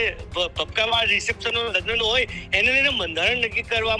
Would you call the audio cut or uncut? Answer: uncut